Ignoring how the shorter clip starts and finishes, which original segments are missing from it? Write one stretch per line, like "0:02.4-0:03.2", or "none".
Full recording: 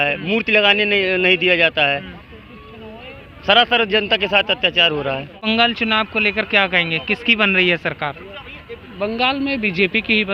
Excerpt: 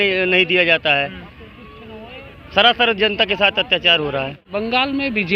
0:05.3-0:08.9